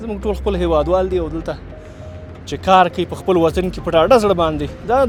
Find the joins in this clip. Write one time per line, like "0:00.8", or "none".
none